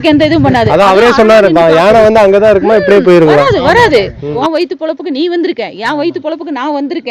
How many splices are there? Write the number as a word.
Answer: one